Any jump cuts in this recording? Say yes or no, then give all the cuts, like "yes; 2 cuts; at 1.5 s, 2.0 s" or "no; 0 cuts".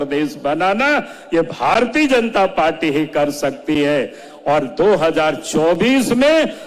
no; 0 cuts